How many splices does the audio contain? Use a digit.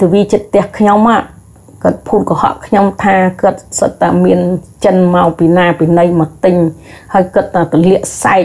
0